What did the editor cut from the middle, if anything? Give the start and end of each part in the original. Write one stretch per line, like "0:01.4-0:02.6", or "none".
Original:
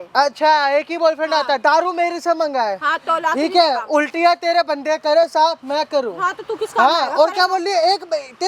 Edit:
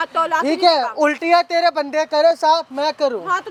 none